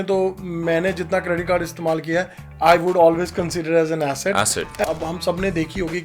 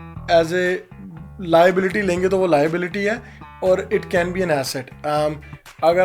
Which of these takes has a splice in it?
first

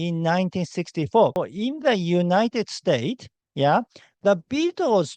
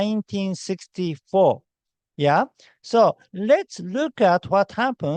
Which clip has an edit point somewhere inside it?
first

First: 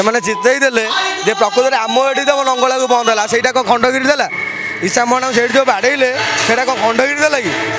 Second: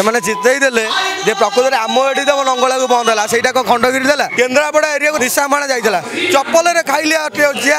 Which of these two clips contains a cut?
second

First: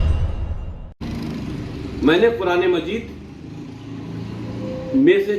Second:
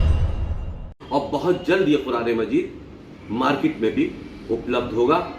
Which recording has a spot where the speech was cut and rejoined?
second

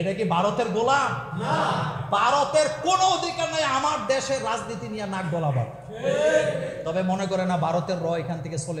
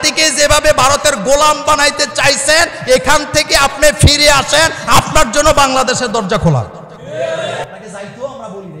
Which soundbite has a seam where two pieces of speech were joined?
second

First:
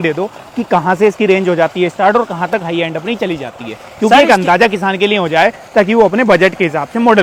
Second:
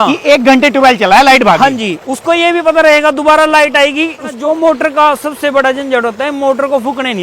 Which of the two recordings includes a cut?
second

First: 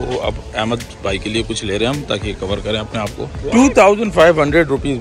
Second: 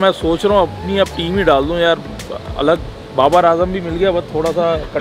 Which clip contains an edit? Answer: first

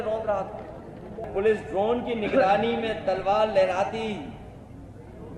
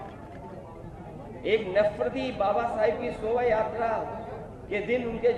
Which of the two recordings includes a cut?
first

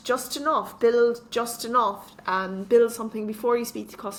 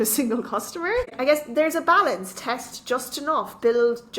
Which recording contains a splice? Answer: second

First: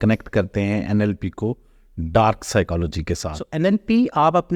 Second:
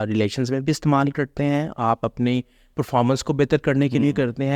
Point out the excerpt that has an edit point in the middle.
first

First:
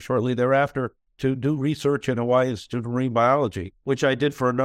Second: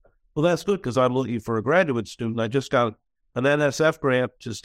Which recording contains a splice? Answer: first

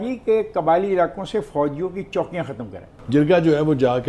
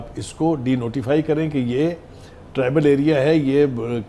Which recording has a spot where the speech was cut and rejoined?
first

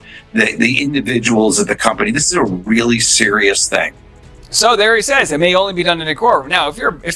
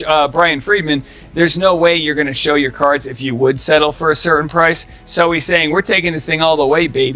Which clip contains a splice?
first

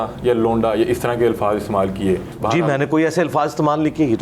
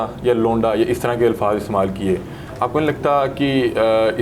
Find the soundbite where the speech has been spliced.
first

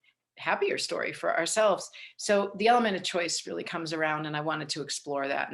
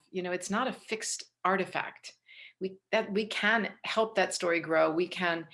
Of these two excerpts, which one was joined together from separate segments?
first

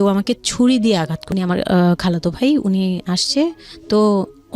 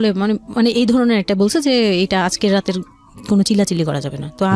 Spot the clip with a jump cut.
first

